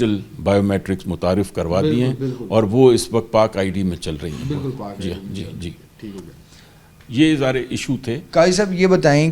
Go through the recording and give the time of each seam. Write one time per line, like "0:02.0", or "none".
none

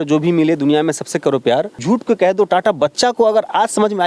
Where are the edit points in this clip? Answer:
0:01.8

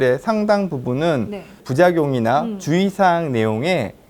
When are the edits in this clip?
0:01.6

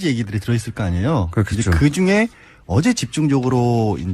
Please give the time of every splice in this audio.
none

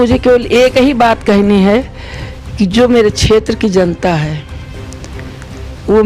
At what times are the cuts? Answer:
none

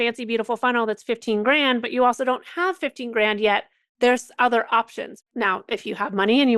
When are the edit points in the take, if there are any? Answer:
0:05.1

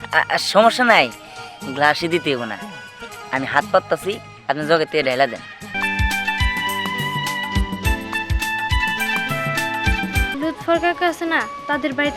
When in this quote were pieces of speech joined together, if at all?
0:05.7
0:10.3

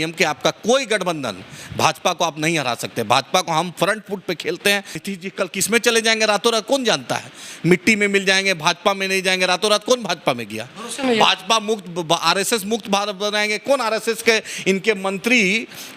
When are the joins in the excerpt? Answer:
0:05.0

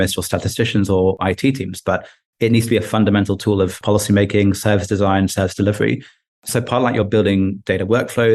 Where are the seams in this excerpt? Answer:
0:01.2
0:03.8

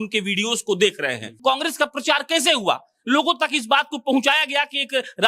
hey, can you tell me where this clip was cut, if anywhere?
0:01.3

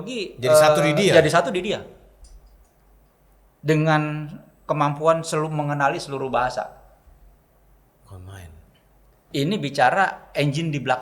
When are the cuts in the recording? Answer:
0:09.2

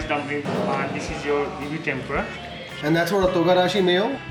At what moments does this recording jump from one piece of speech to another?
none

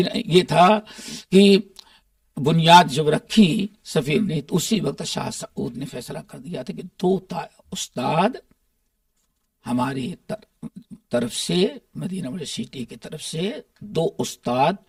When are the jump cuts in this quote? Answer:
none

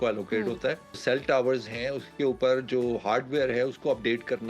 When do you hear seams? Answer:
0:01.0

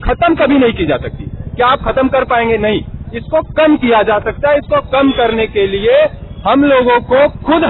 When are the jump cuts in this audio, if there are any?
none

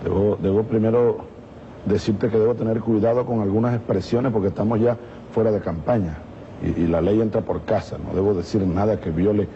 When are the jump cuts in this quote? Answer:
0:02.7

